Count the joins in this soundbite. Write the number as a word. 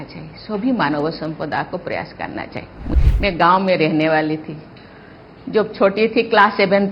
one